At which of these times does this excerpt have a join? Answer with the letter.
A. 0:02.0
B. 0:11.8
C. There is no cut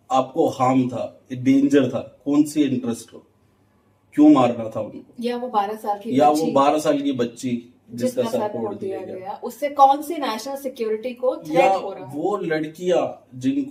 C